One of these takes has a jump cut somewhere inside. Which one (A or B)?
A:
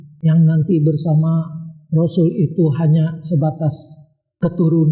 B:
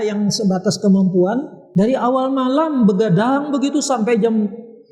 B